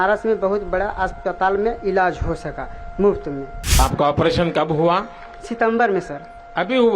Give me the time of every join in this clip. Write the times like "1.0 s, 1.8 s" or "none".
3.8 s